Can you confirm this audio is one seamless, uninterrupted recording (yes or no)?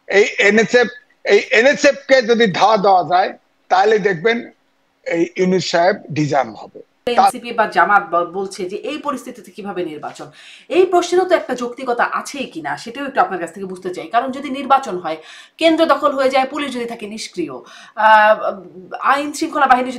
no